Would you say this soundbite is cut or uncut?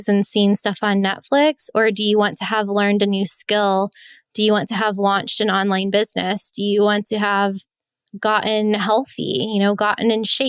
uncut